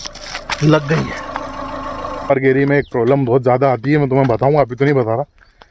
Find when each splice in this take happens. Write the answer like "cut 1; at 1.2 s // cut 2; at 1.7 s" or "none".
cut 1; at 2.3 s